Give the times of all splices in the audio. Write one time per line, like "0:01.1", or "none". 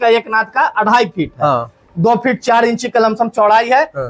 0:01.8